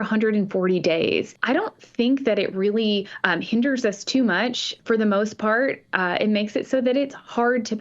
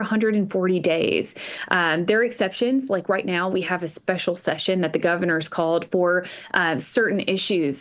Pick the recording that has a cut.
first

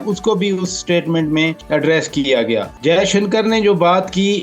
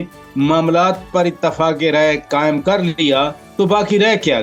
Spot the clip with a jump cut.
first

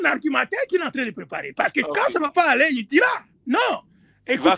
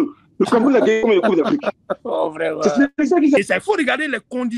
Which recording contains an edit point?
second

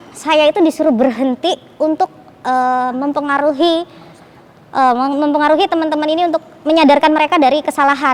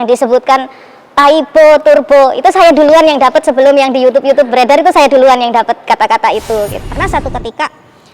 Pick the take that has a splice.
second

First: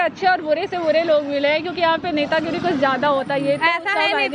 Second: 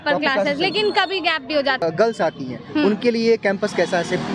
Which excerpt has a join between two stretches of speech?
second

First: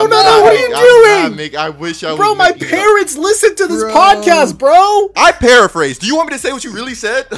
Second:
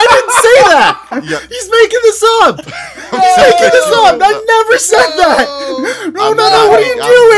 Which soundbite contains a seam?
first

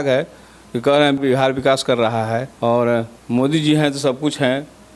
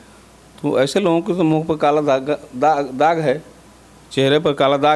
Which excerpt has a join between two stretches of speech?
first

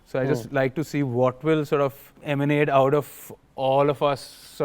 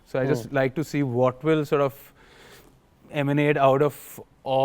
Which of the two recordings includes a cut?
first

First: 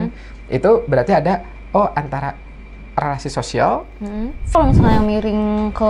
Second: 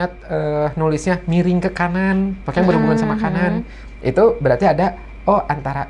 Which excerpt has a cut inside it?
first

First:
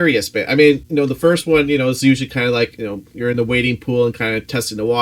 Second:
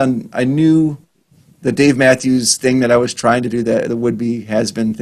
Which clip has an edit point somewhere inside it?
first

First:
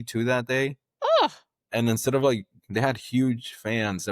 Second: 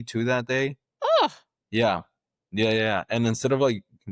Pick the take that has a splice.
first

